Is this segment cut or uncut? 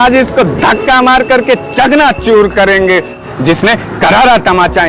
cut